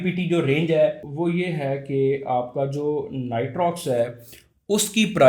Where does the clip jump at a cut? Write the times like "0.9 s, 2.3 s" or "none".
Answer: 1.1 s